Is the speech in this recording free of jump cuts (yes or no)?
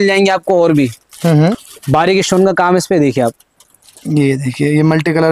no